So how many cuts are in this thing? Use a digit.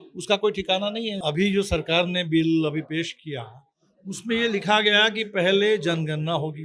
1